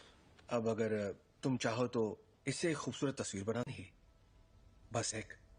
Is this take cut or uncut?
uncut